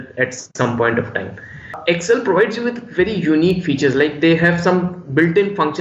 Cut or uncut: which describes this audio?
cut